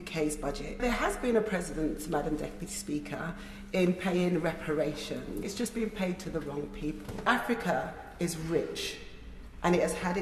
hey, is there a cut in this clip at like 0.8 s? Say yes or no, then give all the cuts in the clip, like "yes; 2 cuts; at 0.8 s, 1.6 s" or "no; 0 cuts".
yes; 3 cuts; at 0.8 s, 5.5 s, 7.2 s